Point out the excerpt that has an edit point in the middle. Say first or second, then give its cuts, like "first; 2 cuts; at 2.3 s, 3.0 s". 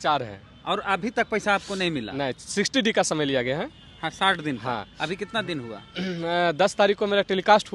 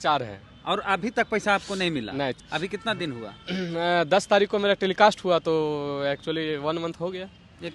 second; 1 cut; at 2.4 s